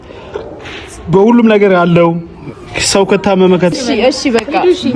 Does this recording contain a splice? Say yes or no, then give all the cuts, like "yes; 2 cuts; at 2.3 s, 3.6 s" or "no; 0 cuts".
yes; 1 cut; at 3.7 s